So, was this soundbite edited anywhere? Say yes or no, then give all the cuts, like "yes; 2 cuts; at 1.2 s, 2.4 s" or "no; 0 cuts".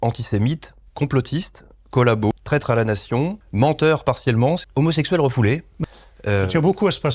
yes; 2 cuts; at 2.3 s, 4.7 s